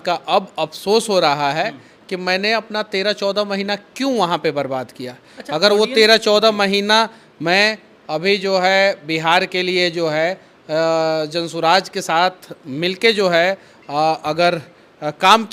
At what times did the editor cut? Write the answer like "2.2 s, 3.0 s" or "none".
none